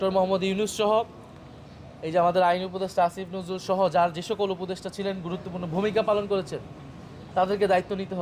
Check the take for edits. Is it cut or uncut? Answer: uncut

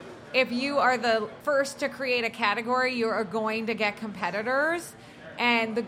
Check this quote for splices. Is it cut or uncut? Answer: cut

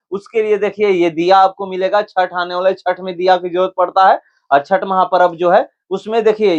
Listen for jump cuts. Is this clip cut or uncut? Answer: uncut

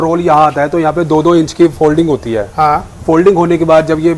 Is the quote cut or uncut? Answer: uncut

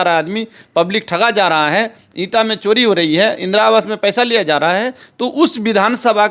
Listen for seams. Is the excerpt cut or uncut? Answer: uncut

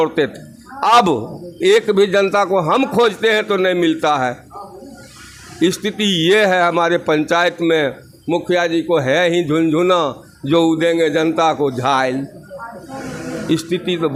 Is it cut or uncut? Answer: uncut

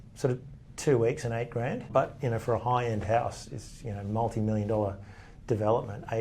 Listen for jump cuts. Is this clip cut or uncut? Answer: cut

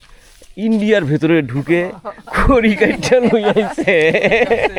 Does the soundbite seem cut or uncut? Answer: uncut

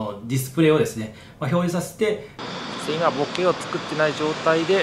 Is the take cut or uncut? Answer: cut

